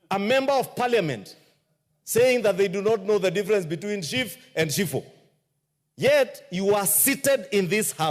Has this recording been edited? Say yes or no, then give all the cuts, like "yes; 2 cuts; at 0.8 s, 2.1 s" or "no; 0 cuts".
no; 0 cuts